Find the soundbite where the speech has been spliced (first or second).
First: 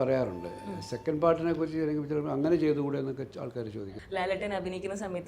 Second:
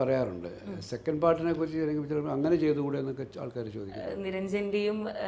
first